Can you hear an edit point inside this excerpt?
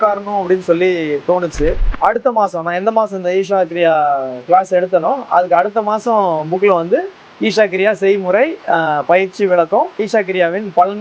yes; 2 cuts; at 1.9 s, 10.0 s

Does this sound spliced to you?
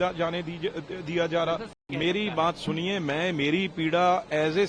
yes; 1 cut; at 1.7 s

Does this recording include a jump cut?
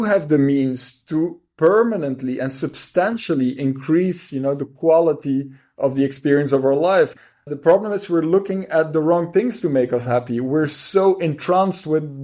yes; 1 cut; at 7.3 s

